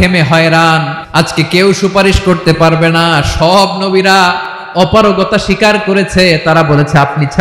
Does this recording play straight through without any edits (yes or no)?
no